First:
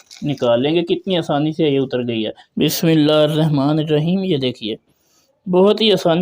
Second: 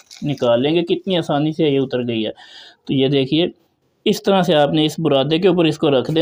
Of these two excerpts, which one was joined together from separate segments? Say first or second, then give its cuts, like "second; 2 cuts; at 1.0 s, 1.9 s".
first; 1 cut; at 2.4 s